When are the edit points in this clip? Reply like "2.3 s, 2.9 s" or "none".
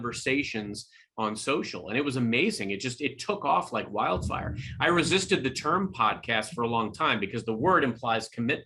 none